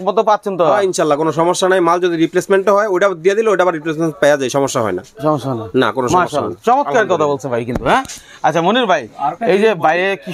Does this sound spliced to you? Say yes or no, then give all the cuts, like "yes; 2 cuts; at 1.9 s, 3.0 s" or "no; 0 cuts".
no; 0 cuts